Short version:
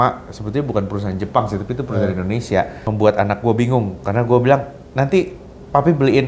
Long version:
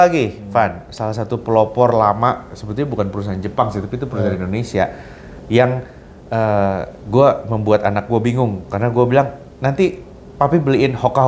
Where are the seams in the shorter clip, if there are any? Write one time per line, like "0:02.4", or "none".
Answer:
0:02.8

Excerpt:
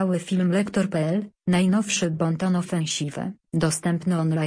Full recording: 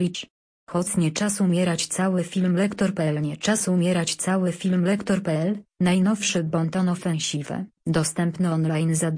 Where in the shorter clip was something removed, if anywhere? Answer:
0:01.0

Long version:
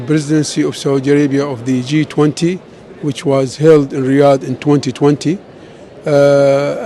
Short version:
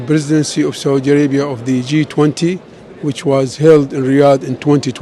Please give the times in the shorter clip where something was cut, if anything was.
none

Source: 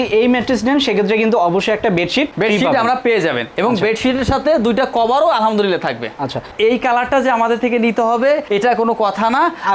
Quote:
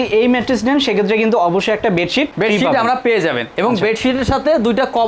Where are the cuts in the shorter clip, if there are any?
none

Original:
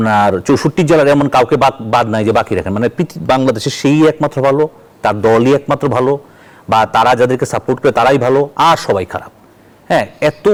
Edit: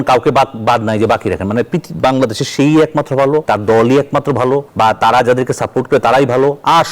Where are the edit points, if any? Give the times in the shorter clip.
0:03.5
0:04.7

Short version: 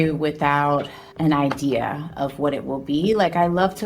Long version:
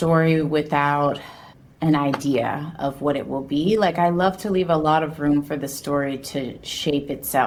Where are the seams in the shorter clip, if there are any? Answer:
0:01.0

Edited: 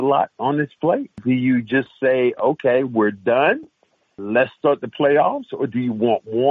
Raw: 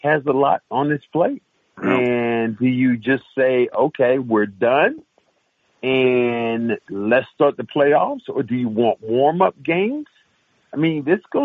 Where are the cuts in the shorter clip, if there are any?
0:01.2
0:04.1

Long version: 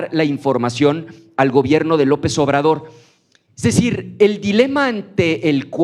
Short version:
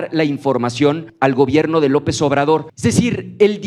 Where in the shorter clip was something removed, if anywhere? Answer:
0:01.1
0:02.7

